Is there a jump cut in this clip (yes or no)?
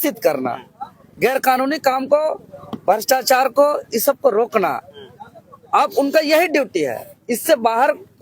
no